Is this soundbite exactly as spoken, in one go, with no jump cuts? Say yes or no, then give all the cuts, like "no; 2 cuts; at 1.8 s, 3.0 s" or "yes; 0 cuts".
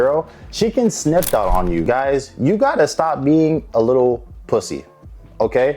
no; 1 cut; at 1.8 s